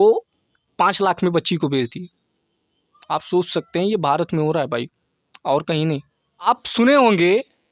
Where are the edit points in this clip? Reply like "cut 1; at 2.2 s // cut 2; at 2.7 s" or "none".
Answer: cut 1; at 6.5 s